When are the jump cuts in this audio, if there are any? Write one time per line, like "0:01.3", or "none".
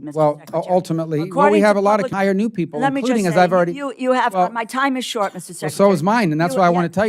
0:02.1